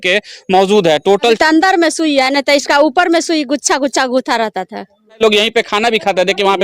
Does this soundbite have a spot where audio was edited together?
yes; 2 cuts; at 1.4 s, 5.2 s

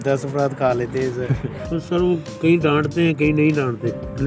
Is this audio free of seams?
no; 1 cut; at 1.5 s

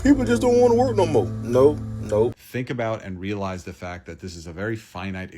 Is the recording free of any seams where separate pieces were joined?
no; 1 cut; at 2.4 s

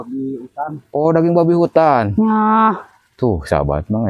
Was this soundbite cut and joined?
no; 0 cuts

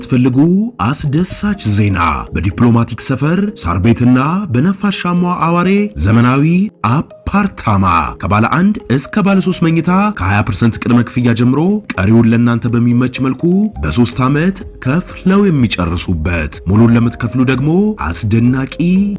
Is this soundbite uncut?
yes; 0 cuts

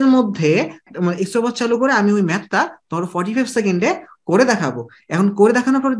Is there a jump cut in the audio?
no; 0 cuts

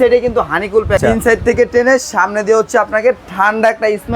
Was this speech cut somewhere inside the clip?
yes; 1 cut; at 1.0 s

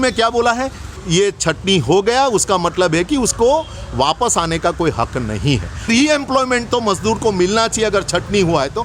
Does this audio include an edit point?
yes; 2 cuts; at 1.1 s, 5.9 s

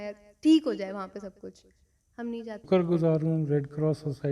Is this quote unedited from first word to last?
no; 1 cut; at 2.7 s

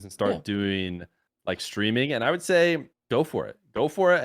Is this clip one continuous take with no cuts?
no; 1 cut; at 2.9 s

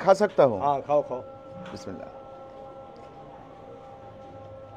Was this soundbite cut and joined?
no; 0 cuts

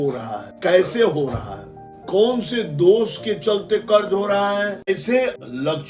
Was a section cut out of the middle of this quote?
yes; 1 cut; at 4.9 s

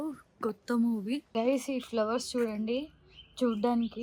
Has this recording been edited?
yes; 1 cut; at 1.3 s

